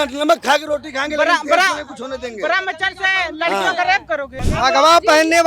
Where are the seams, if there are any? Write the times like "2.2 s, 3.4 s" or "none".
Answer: 4.3 s